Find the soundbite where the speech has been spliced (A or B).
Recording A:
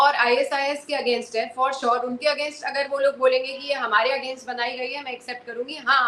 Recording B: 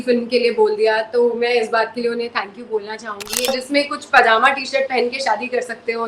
B